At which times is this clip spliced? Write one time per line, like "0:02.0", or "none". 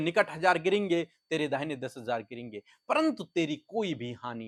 none

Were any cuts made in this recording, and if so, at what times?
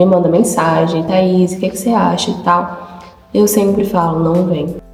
none

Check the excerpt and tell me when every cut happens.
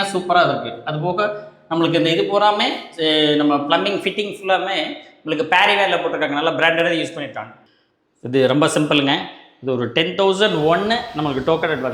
0:07.6

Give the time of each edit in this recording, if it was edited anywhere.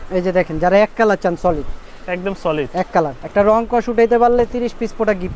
0:03.2

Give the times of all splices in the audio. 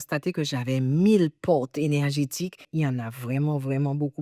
none

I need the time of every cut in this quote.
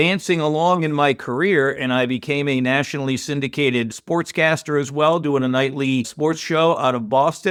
none

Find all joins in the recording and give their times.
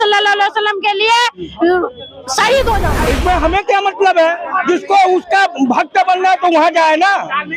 0:02.9

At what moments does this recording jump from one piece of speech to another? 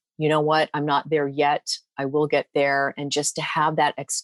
none

